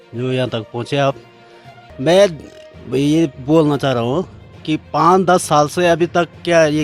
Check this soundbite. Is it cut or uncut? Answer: uncut